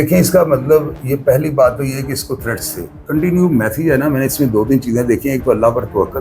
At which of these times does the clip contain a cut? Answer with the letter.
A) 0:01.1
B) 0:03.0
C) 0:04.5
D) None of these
B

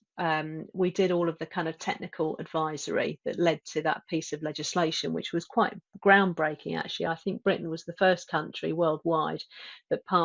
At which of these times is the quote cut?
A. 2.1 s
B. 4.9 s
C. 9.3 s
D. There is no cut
D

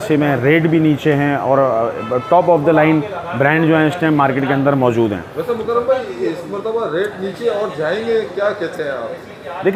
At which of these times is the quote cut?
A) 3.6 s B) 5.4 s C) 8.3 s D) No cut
D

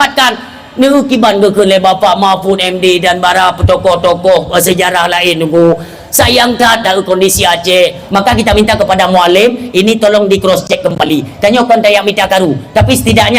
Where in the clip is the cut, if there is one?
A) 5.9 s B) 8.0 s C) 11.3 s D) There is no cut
B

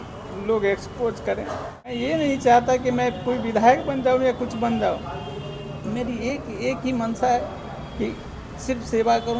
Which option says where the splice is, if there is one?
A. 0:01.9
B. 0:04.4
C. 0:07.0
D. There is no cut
A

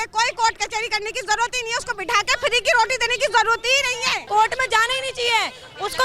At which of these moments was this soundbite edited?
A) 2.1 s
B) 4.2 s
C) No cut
B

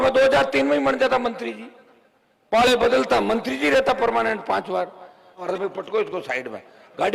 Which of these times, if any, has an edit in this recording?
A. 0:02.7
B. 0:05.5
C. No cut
B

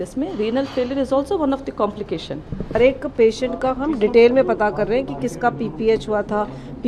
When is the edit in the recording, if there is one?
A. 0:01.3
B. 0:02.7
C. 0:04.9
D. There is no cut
B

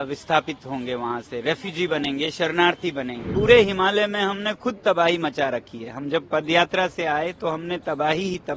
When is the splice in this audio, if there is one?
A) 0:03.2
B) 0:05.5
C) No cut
A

